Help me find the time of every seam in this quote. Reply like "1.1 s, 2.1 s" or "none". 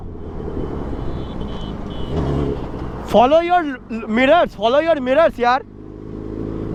none

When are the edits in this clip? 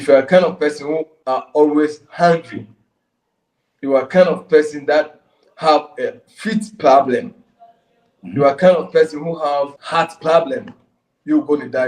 1.1 s, 9.8 s

